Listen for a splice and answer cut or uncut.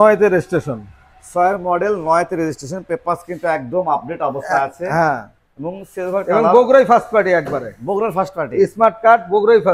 uncut